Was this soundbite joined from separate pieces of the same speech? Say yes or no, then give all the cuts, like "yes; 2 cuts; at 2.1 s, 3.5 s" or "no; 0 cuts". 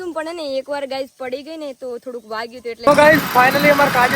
yes; 1 cut; at 2.9 s